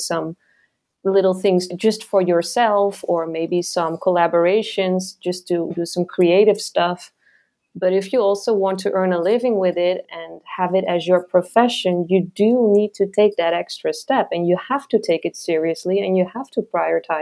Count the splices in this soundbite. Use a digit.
2